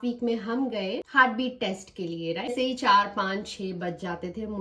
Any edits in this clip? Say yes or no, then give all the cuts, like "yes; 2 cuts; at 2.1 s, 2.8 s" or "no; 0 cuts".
yes; 2 cuts; at 1.1 s, 2.5 s